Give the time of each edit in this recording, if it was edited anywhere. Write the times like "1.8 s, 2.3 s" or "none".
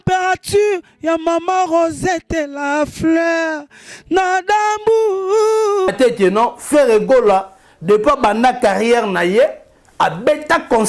5.9 s